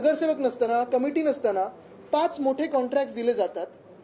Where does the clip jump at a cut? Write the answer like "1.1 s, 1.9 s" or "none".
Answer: none